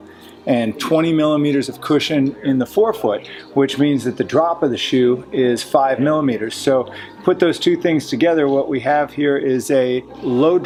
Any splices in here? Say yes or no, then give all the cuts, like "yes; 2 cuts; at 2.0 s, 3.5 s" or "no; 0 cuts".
no; 0 cuts